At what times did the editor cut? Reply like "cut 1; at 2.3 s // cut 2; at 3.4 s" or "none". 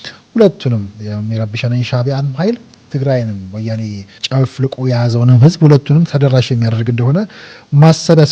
cut 1; at 2.7 s // cut 2; at 4.2 s // cut 3; at 6.1 s